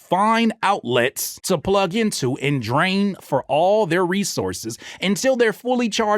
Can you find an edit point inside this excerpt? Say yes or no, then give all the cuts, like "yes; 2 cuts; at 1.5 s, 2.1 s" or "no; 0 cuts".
no; 0 cuts